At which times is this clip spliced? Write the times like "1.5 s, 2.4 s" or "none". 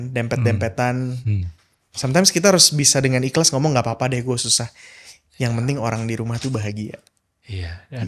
none